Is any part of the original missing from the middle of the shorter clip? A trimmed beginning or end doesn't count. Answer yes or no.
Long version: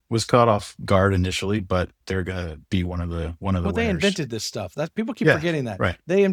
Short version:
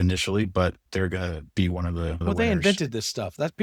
yes